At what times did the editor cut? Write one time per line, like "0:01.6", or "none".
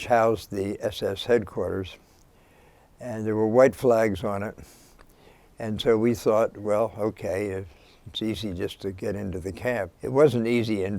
0:09.9